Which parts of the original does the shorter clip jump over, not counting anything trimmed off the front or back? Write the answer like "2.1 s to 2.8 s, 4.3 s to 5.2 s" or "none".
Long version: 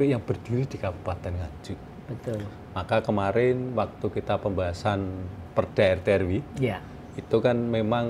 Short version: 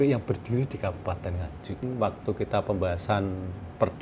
1.8 s to 3.6 s